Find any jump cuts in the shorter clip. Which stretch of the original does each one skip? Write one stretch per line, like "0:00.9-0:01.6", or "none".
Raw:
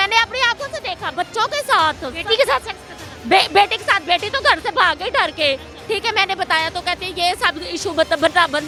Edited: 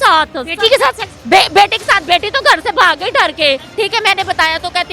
0:02.8-0:03.1
0:05.7-0:05.8